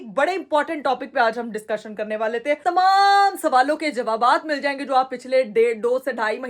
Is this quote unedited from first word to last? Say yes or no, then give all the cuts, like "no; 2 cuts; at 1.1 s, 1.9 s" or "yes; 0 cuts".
no; 1 cut; at 2.6 s